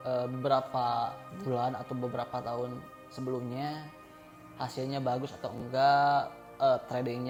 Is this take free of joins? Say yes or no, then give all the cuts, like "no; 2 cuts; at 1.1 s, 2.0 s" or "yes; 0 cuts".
yes; 0 cuts